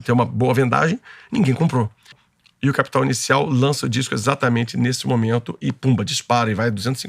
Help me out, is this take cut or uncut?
cut